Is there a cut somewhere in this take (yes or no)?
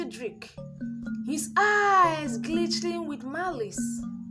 no